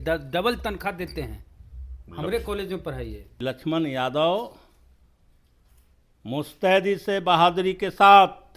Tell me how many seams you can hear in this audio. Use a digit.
1